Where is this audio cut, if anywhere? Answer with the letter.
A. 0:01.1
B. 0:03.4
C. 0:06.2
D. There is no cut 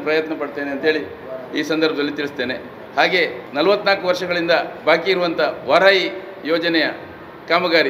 B